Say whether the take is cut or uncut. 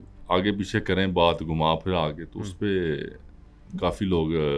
uncut